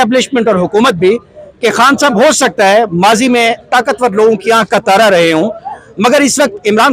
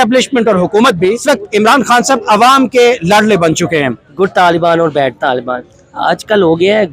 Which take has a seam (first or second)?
second